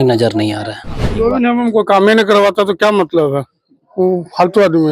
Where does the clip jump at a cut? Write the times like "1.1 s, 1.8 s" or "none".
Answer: 1.1 s

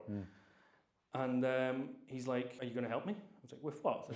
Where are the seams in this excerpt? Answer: 2.5 s

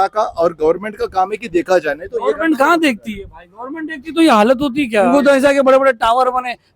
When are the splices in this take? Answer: 5.1 s

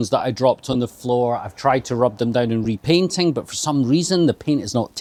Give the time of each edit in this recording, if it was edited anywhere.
none

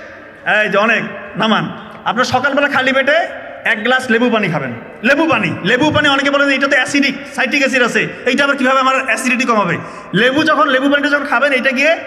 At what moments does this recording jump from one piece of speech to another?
none

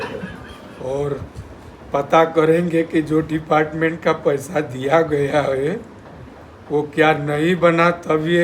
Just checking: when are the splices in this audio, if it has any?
none

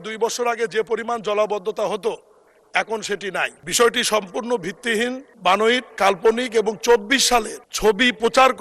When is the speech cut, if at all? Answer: 3.6 s, 5.3 s, 5.9 s, 7.6 s

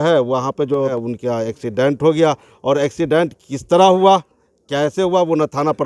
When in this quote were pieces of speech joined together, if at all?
1.0 s

